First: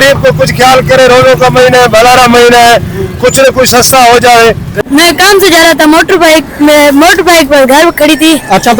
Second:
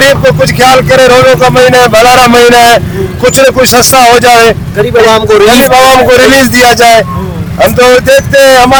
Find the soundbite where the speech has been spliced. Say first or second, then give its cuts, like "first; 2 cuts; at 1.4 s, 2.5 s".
first; 1 cut; at 4.8 s